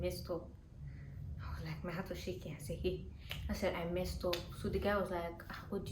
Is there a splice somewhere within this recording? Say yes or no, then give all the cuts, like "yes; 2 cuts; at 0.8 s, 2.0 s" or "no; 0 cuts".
no; 0 cuts